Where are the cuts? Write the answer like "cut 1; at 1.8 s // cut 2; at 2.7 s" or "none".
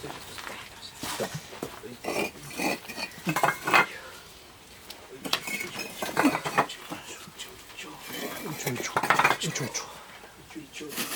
none